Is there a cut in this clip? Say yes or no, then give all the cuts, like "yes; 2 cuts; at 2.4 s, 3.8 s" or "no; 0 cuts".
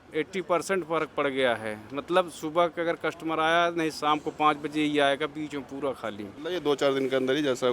yes; 1 cut; at 6.4 s